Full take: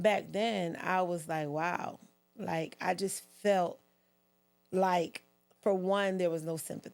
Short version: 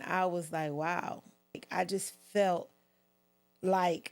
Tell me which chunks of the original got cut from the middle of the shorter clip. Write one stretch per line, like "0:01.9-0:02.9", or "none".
0:02.4-0:02.7